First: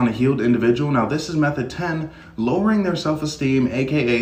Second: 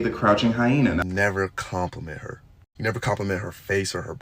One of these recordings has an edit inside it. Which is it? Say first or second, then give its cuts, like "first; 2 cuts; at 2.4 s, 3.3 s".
second; 1 cut; at 1.0 s